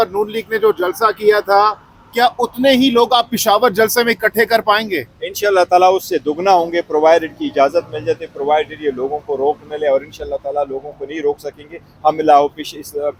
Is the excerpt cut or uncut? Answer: uncut